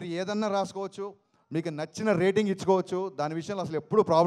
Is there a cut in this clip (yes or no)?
no